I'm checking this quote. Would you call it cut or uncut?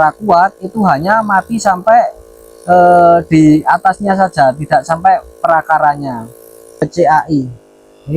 cut